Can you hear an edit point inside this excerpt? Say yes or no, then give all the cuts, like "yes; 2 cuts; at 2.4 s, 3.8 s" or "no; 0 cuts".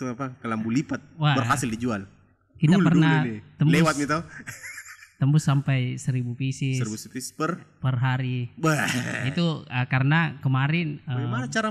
no; 0 cuts